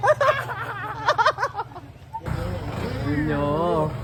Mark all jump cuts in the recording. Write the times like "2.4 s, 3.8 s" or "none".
none